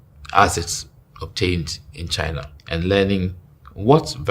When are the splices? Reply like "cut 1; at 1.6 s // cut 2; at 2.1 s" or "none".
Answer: cut 1; at 2.5 s